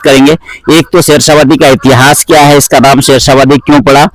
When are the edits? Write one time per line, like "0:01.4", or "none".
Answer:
none